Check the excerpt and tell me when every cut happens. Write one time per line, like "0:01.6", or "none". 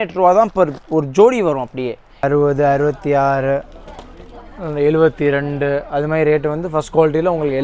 0:02.1